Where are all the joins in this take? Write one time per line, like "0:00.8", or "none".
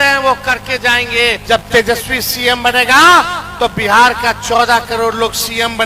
0:01.4